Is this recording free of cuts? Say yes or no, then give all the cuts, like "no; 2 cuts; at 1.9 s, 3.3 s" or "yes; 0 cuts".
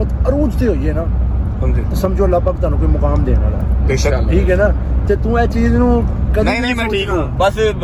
yes; 0 cuts